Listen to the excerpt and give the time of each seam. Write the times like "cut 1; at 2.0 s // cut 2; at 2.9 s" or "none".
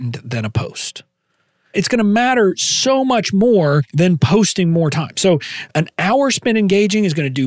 cut 1; at 1.7 s // cut 2; at 3.9 s // cut 3; at 5.6 s